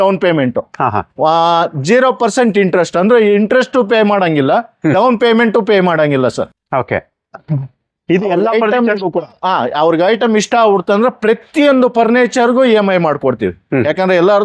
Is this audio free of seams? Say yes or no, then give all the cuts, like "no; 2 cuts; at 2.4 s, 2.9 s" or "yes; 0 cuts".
yes; 0 cuts